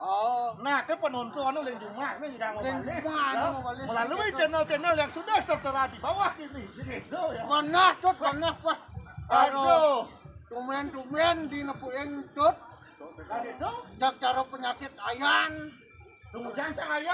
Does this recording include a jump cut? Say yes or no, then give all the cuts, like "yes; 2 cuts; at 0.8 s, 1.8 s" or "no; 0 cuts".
no; 0 cuts